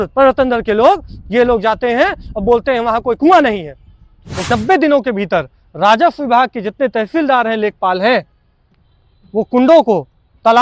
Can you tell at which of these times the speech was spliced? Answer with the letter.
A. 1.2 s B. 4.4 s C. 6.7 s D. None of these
B